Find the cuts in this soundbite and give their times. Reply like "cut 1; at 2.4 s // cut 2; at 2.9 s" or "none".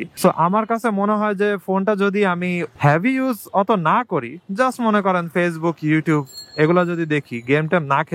none